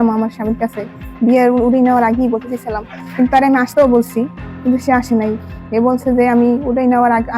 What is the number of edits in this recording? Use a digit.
0